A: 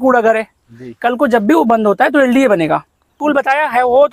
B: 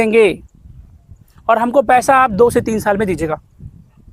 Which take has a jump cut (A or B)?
A